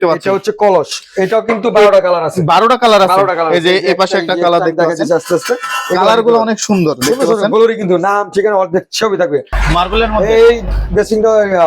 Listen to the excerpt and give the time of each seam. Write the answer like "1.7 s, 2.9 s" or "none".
9.6 s